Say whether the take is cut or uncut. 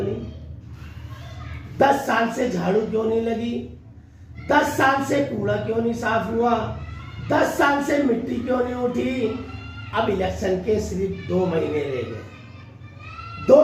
uncut